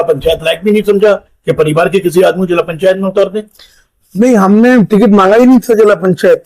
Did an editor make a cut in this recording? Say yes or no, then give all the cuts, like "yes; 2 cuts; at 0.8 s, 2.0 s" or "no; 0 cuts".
no; 0 cuts